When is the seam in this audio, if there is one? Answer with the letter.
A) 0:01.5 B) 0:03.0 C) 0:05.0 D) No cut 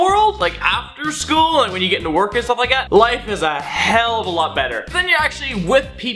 C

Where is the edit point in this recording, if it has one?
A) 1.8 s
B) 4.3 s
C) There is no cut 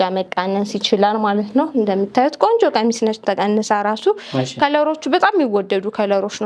C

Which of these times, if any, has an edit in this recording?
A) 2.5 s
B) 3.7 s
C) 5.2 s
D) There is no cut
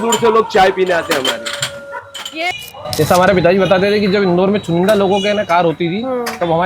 A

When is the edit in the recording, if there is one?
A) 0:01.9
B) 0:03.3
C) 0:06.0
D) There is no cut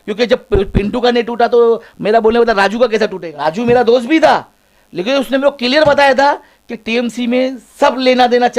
B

